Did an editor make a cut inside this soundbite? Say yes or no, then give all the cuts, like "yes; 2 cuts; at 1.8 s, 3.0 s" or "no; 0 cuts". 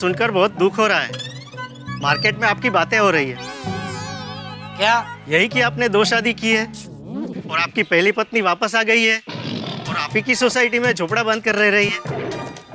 no; 0 cuts